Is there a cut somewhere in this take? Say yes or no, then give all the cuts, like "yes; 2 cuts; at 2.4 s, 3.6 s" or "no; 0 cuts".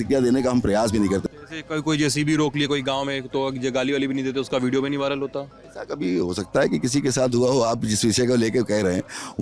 yes; 1 cut; at 1.2 s